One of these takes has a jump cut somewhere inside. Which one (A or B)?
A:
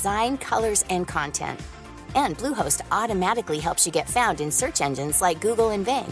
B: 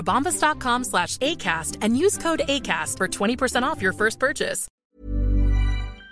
B